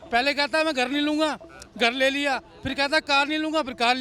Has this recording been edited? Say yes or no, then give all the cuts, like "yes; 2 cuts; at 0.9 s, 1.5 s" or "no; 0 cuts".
no; 0 cuts